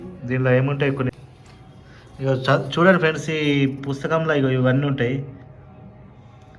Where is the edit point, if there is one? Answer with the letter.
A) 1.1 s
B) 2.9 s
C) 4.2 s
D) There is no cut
A